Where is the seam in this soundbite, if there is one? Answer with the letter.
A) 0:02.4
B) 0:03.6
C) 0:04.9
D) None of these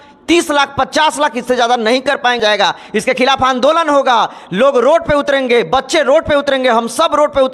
A